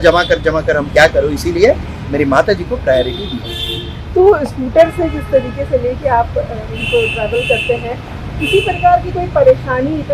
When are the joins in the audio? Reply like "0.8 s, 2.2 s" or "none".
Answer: none